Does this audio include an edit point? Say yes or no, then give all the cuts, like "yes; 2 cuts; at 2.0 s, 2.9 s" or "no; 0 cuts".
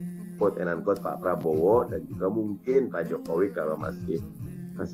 no; 0 cuts